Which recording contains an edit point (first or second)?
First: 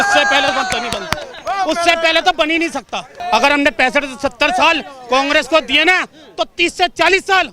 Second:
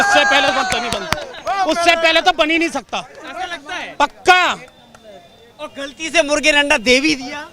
first